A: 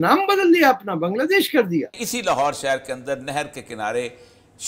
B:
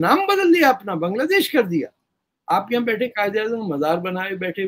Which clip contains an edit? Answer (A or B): A